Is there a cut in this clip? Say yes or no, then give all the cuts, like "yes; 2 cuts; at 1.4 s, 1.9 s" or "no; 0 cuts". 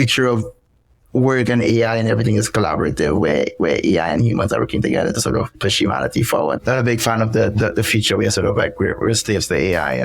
yes; 2 cuts; at 5.6 s, 6.6 s